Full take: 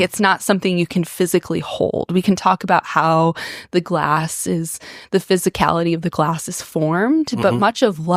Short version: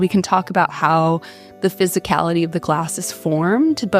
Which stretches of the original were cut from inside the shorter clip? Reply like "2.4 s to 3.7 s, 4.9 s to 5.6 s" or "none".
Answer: 3.5 s to 4.9 s